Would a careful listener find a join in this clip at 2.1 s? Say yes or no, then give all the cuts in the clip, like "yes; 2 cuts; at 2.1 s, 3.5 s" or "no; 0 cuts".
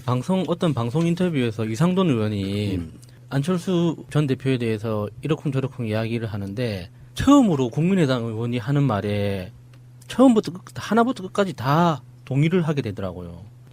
no; 1 cut; at 12.7 s